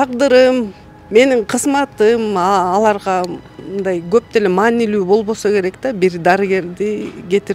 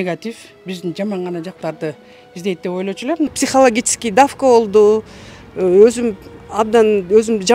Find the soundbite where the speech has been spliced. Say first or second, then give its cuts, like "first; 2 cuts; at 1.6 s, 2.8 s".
second; 1 cut; at 3.3 s